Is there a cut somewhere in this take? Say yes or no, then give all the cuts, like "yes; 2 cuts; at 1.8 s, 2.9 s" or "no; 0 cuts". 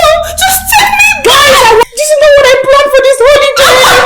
yes; 1 cut; at 1.8 s